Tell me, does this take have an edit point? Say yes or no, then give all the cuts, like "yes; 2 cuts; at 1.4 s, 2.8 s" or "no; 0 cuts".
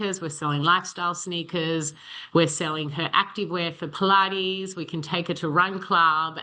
no; 0 cuts